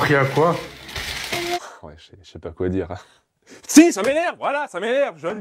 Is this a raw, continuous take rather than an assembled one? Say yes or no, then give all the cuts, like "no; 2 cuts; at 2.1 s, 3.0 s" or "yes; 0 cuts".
no; 1 cut; at 1.6 s